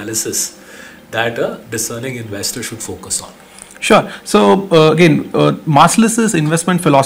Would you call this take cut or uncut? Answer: uncut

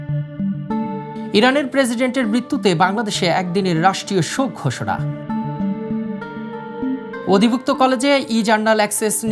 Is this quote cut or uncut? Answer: cut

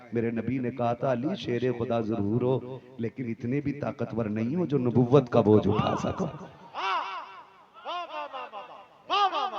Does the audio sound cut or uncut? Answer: uncut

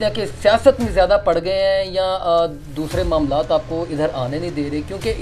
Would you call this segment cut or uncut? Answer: uncut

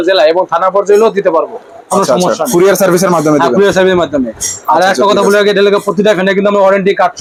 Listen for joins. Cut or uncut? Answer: uncut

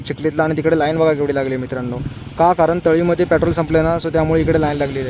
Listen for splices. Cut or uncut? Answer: uncut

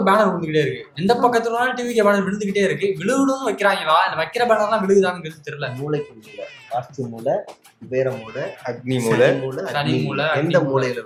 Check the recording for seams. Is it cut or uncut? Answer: uncut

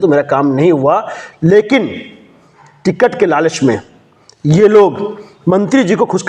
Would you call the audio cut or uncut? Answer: uncut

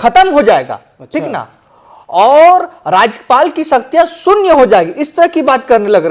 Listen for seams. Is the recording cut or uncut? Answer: uncut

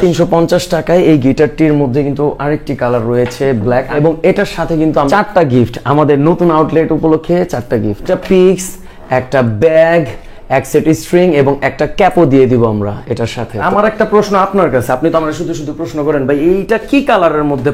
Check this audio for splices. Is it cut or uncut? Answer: cut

